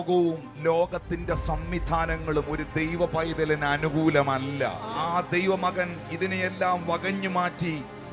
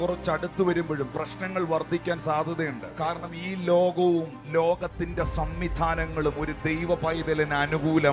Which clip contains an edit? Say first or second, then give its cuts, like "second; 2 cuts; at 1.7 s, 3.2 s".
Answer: second; 1 cut; at 2.9 s